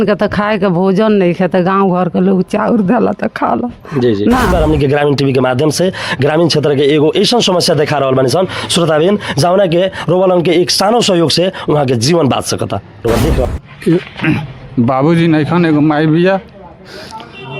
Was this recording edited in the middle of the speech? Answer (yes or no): yes